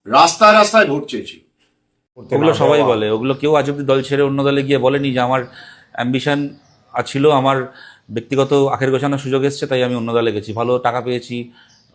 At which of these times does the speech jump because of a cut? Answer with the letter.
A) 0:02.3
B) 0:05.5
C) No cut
A